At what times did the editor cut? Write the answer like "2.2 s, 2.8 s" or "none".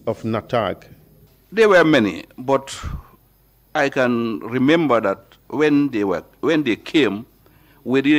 1.2 s